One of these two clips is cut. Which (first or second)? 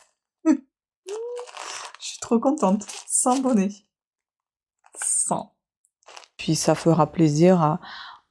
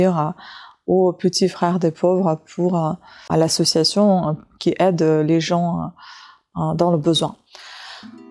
first